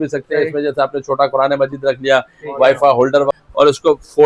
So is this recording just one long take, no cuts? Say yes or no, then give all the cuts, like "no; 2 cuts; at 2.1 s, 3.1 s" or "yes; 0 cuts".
no; 1 cut; at 3.3 s